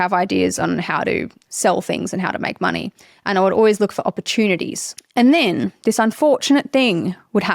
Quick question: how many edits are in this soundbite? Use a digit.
1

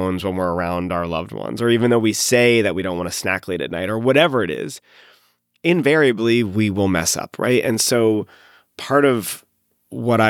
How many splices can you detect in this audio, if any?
1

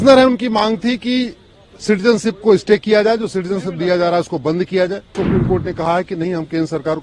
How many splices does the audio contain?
1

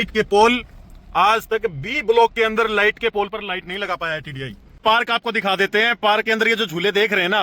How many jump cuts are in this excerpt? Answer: 1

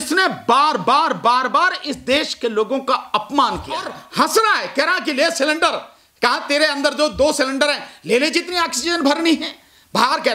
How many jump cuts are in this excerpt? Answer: 1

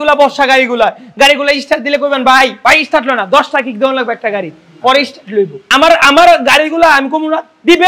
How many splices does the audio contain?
2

